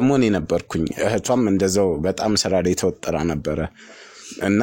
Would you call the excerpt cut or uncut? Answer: uncut